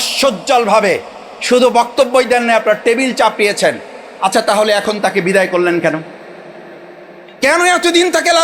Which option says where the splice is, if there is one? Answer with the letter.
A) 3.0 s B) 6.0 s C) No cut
C